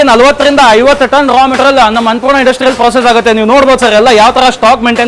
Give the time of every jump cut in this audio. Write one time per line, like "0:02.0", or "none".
none